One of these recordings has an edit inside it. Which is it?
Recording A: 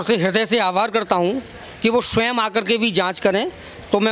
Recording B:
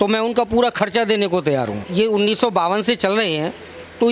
B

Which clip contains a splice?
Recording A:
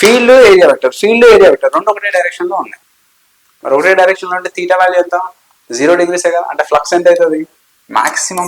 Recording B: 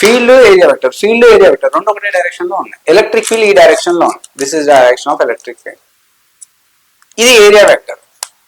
B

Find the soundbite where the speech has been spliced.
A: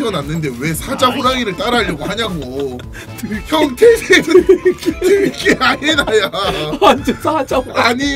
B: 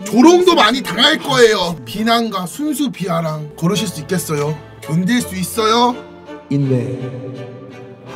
B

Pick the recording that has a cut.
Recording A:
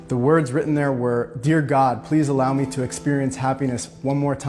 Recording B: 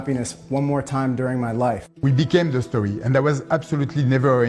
B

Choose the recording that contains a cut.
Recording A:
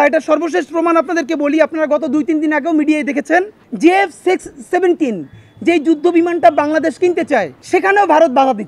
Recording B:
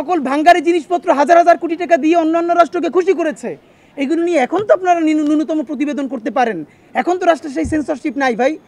A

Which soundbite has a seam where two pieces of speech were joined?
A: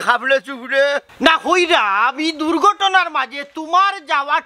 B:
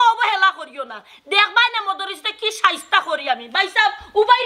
A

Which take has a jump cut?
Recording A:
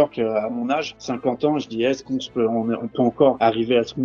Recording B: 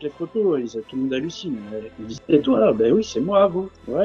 A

